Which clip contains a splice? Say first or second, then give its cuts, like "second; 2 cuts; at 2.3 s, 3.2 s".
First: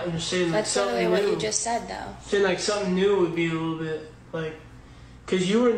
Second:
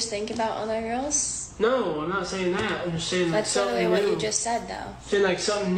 second; 1 cut; at 1.8 s